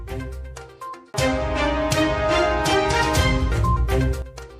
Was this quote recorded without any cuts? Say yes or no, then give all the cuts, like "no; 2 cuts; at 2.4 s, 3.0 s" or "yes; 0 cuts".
no; 2 cuts; at 1.1 s, 3.4 s